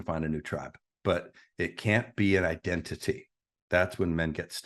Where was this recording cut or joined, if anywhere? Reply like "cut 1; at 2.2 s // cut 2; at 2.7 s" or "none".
none